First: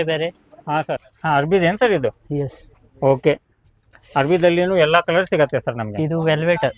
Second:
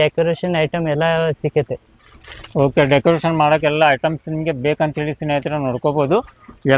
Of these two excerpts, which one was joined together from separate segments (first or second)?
first